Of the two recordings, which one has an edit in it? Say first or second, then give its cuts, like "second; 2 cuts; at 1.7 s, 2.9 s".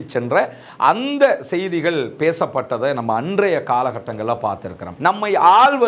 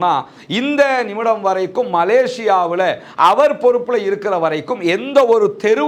first; 1 cut; at 4.9 s